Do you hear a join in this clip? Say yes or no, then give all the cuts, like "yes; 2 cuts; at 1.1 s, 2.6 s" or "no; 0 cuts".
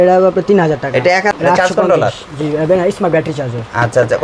yes; 1 cut; at 1.3 s